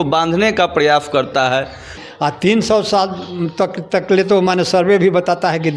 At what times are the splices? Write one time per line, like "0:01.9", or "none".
0:01.9